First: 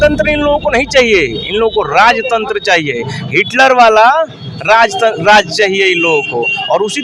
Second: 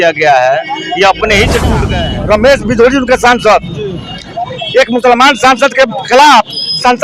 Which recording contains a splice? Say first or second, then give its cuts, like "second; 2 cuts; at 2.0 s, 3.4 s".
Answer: second; 1 cut; at 1.9 s